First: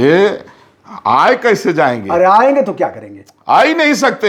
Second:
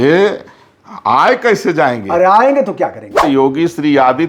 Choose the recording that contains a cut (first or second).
second